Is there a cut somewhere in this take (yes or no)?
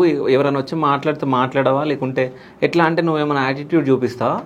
no